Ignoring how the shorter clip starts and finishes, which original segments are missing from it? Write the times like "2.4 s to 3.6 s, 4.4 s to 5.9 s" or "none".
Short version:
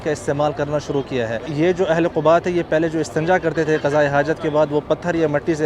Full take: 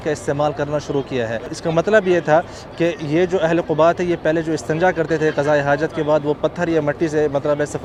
1.5 s to 3.0 s